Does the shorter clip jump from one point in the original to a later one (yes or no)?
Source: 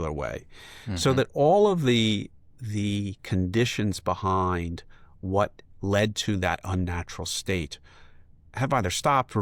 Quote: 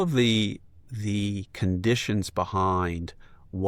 no